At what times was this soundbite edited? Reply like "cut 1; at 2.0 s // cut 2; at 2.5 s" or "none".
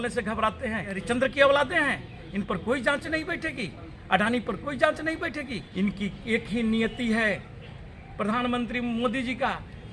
cut 1; at 1.0 s // cut 2; at 5.6 s